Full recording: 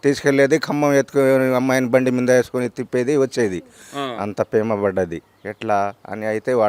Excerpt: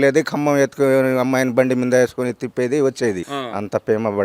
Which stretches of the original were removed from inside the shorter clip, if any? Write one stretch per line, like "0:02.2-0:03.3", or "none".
0:03.7-0:04.0